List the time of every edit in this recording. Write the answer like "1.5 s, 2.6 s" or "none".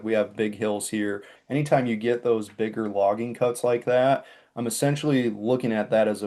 1.3 s